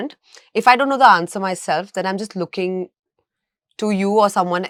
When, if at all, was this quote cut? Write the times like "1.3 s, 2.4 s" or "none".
none